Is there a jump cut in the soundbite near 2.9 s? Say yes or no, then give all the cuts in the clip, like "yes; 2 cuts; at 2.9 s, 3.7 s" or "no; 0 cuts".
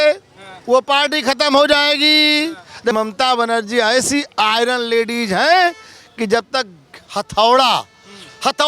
yes; 1 cut; at 2.9 s